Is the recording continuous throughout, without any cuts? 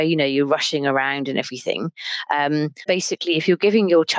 no; 1 cut; at 2.8 s

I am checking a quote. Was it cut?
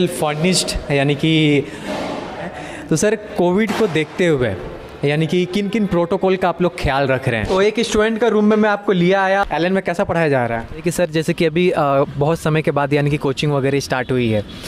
yes; 3 cuts; at 2.5 s, 7.4 s, 10.8 s

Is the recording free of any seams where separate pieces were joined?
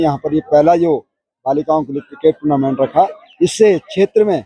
yes; 0 cuts

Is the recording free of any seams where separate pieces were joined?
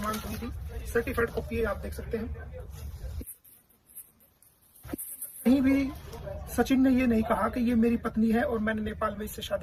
yes; 0 cuts

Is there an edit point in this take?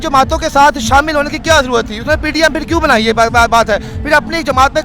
no; 0 cuts

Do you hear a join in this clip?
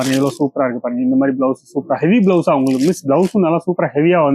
no; 0 cuts

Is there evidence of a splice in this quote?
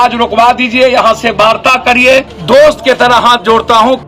yes; 1 cut; at 2.4 s

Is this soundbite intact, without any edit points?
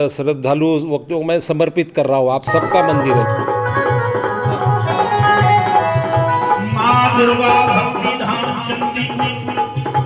no; 1 cut; at 3.0 s

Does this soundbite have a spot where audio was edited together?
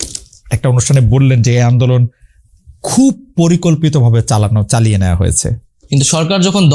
yes; 1 cut; at 5.6 s

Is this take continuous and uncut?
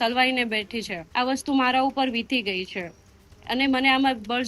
no; 1 cut; at 1.0 s

